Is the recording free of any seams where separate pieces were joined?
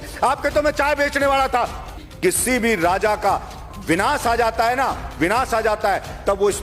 no; 1 cut; at 2.0 s

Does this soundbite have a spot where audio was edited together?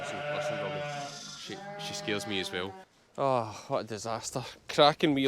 yes; 1 cut; at 2.8 s

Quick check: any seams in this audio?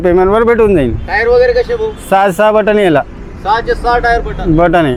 no; 0 cuts

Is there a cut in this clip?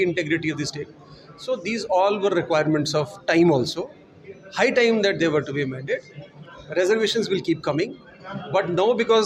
no; 0 cuts

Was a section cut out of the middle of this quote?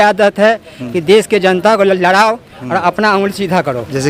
no; 0 cuts

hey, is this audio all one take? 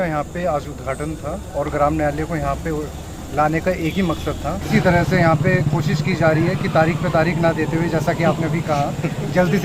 no; 1 cut; at 4.6 s

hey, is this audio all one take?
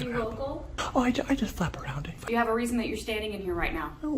no; 1 cut; at 2.2 s

